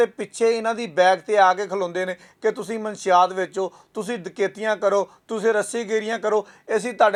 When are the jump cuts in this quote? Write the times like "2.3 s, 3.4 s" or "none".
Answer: none